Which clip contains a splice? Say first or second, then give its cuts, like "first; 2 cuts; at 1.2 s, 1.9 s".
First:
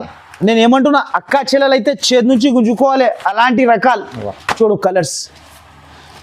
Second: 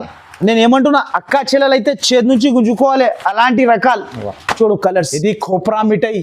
second; 1 cut; at 5.1 s